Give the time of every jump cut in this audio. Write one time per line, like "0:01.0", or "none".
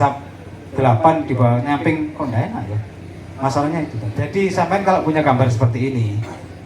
0:04.0